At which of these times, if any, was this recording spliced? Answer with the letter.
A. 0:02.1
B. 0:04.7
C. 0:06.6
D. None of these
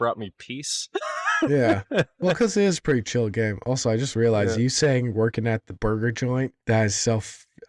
C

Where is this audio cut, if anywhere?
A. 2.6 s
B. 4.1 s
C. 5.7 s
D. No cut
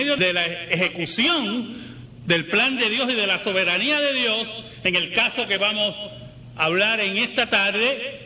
C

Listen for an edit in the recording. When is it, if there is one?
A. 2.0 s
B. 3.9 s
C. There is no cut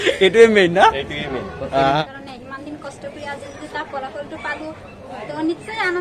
A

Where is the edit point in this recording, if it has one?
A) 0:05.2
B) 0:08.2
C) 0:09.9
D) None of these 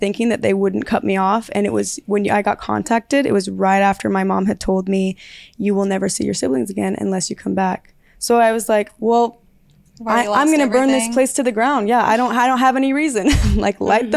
D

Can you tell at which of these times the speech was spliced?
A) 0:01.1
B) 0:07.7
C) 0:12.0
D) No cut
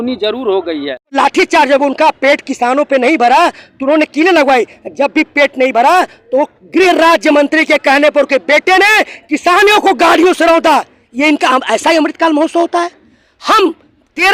A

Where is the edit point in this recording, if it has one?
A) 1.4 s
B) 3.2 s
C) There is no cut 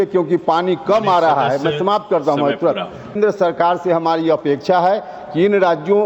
B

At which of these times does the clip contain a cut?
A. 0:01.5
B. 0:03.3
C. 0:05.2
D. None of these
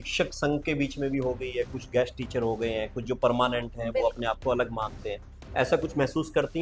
D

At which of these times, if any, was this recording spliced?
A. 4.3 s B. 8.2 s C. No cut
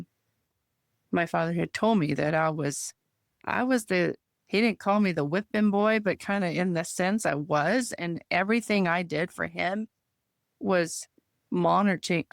A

